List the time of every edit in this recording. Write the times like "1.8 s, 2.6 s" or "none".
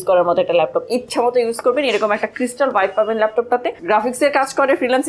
3.7 s